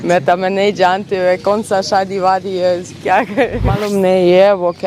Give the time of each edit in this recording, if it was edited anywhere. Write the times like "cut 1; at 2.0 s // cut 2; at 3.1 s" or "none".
cut 1; at 3.8 s